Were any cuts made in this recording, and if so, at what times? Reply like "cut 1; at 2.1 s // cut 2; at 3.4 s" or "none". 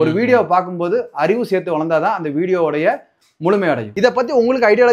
cut 1; at 3.9 s